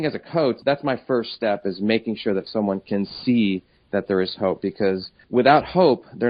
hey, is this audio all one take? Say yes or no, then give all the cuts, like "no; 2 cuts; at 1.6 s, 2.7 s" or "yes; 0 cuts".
yes; 0 cuts